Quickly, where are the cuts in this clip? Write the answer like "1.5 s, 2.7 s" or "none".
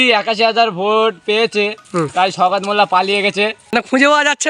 1.8 s, 3.7 s